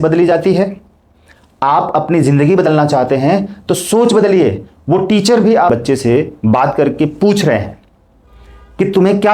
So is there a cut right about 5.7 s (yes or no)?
yes